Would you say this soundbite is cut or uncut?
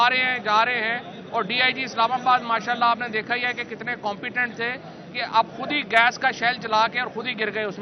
uncut